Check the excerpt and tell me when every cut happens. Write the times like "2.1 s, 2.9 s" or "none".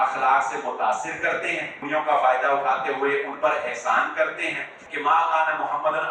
1.8 s, 4.8 s